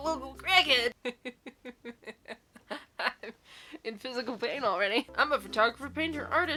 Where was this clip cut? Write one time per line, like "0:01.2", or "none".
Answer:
none